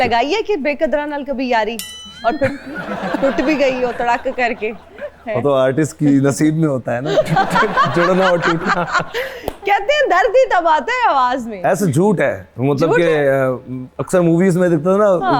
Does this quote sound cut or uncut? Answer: uncut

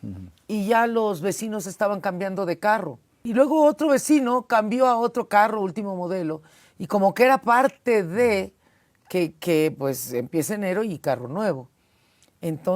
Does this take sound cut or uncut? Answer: cut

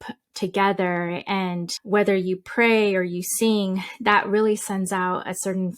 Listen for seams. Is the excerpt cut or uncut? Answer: cut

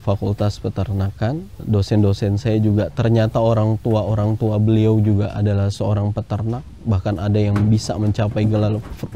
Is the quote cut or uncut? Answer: cut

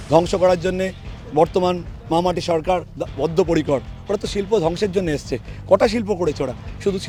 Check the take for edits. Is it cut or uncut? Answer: uncut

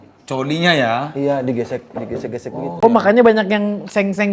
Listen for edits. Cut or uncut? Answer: cut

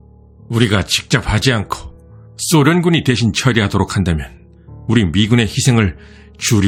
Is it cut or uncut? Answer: uncut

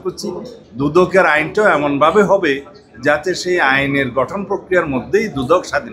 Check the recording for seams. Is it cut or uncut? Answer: uncut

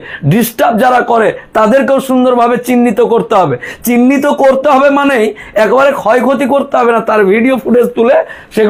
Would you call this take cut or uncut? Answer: uncut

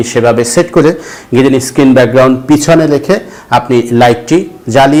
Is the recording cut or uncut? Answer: uncut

